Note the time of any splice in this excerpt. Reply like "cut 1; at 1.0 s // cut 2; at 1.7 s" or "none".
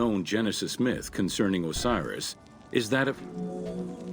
cut 1; at 3.2 s